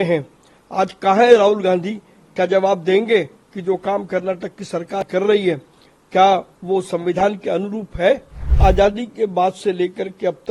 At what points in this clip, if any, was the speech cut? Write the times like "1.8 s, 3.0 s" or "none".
8.5 s

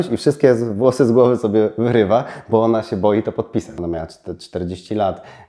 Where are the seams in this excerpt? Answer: 3.7 s

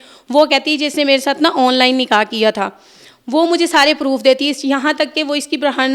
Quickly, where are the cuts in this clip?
none

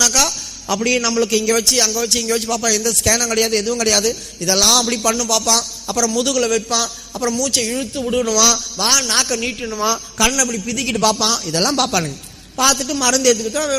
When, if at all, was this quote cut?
none

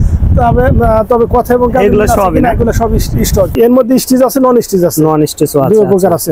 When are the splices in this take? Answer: 3.5 s

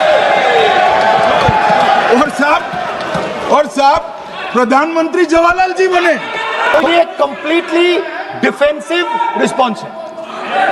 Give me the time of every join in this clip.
6.7 s

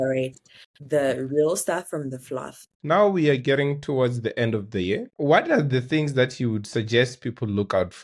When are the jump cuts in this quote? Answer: 2.7 s, 5.1 s

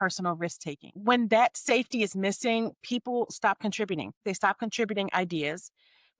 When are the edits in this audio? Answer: 0.9 s, 4.2 s

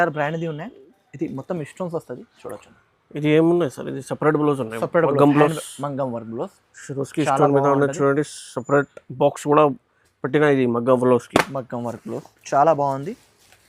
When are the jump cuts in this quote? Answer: none

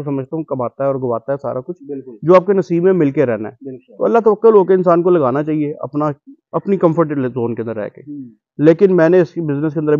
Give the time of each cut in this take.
none

